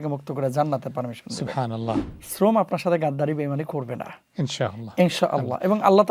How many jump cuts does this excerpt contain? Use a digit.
1